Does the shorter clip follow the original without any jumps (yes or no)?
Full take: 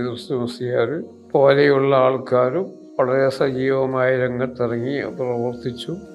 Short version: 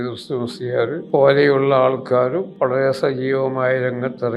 no